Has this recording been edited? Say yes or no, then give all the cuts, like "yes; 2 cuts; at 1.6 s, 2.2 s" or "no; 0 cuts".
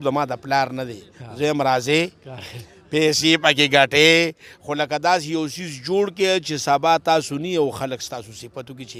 no; 0 cuts